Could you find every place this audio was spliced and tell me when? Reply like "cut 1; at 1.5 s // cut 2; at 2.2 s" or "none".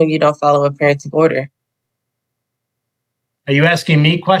none